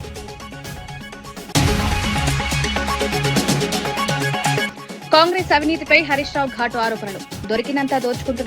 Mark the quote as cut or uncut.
uncut